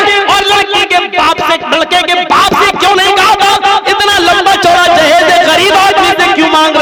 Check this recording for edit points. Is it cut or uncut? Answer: uncut